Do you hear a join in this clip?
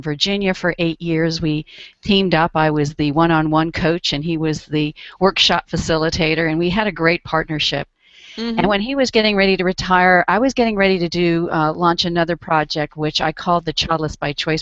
yes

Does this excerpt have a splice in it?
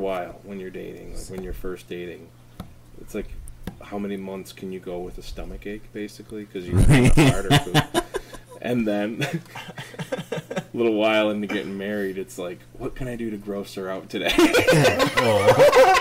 no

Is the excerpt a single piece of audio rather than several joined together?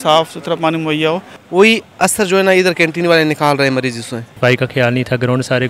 no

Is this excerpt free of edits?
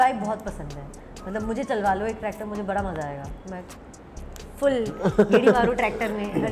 yes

